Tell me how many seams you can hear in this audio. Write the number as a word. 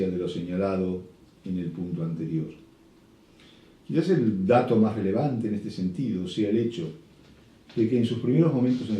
one